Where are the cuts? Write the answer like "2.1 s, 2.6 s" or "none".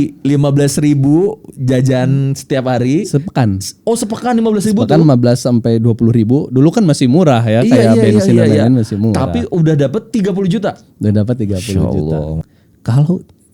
12.4 s